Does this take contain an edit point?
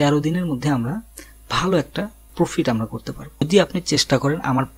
yes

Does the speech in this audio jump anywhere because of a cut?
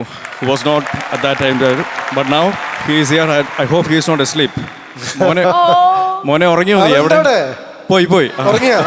no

